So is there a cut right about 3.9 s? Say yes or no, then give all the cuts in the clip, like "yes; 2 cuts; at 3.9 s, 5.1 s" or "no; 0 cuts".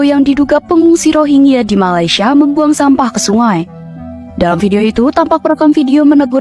no; 0 cuts